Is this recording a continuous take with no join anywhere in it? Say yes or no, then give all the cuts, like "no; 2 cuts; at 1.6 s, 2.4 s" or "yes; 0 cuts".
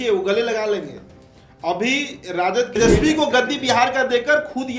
no; 1 cut; at 2.8 s